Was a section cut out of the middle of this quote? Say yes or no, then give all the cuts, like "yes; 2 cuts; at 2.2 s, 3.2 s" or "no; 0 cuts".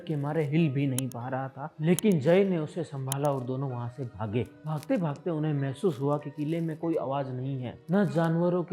no; 0 cuts